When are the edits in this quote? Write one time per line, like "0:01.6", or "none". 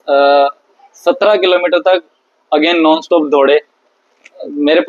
none